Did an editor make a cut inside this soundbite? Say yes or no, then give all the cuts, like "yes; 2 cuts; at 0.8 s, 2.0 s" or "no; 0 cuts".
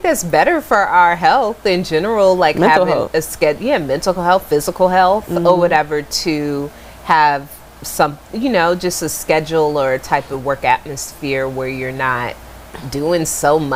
no; 0 cuts